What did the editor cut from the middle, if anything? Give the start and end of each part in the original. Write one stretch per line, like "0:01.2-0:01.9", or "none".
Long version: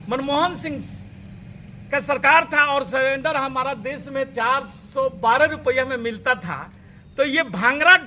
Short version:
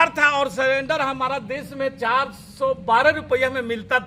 none